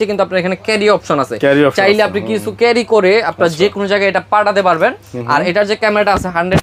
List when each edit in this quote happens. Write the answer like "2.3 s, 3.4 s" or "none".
none

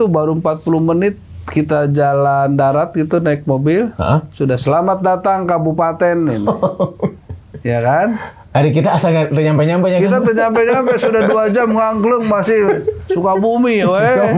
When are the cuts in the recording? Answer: none

